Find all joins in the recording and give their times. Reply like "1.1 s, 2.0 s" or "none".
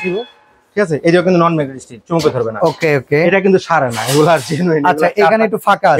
none

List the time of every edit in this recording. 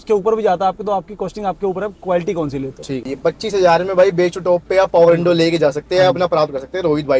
3.0 s

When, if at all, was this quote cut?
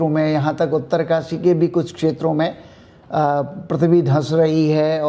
none

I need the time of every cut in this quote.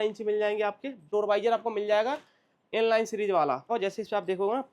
1.1 s, 3.7 s

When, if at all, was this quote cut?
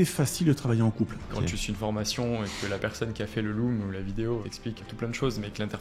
1.4 s, 4.8 s

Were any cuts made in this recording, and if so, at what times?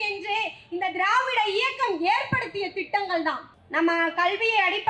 3.5 s

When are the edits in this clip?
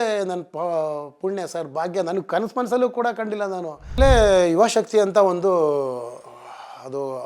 4.0 s

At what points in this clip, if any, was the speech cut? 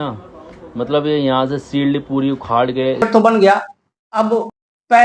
3.0 s

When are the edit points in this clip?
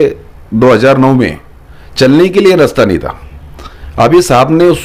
none

